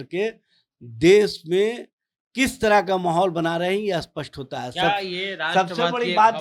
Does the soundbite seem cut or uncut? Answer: uncut